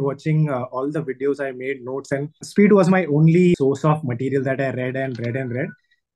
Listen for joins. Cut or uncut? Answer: cut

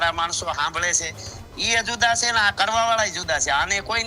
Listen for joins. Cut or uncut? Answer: uncut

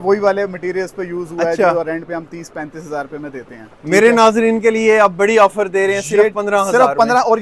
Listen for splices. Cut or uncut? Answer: uncut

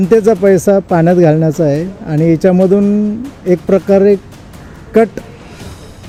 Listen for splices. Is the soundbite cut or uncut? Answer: uncut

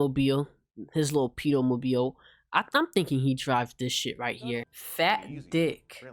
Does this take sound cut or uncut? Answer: cut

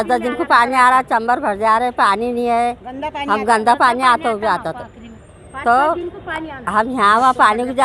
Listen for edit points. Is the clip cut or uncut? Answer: uncut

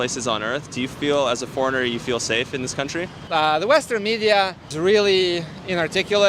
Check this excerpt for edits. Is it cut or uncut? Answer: uncut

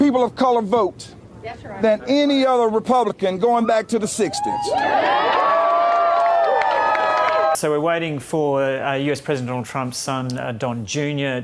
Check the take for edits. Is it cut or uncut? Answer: cut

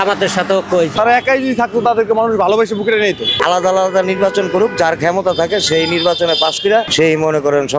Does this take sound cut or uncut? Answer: cut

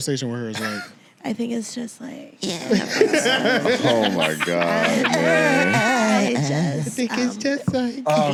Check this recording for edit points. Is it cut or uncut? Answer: uncut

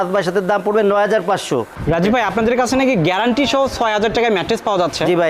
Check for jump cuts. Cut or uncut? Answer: cut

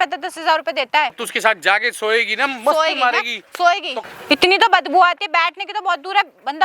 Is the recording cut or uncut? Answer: cut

